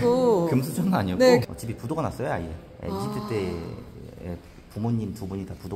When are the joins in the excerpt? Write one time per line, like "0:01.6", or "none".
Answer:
0:01.4